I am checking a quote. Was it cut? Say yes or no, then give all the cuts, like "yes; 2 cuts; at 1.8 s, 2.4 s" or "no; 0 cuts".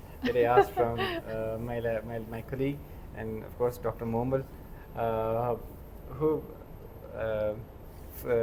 no; 0 cuts